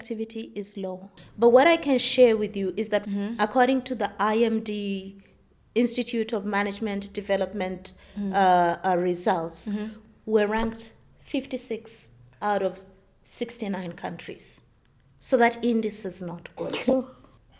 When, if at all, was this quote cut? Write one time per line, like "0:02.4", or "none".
0:01.1
0:03.0
0:09.9